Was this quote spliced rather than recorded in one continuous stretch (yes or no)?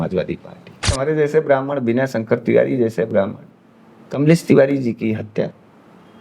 yes